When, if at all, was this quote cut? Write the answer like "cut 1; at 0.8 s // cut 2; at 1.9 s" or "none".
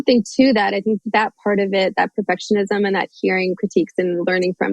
cut 1; at 1.0 s